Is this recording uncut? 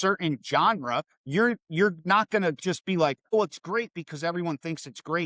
no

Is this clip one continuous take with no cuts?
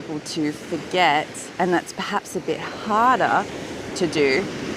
yes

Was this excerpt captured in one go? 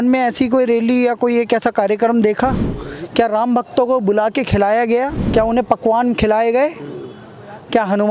no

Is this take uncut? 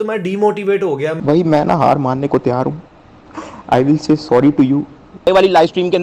no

